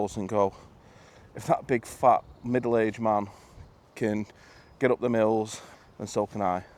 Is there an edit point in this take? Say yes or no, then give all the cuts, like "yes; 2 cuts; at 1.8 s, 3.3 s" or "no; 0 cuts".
yes; 1 cut; at 5.6 s